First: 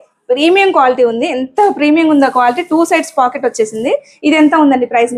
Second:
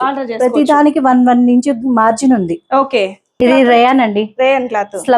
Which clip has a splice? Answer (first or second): second